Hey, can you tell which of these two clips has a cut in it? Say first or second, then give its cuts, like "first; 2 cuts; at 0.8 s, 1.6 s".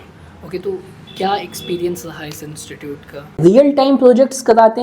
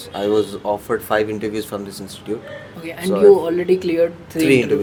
first; 1 cut; at 3.4 s